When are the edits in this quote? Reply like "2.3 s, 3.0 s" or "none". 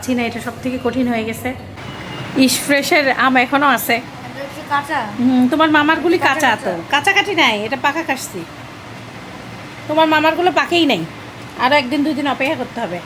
none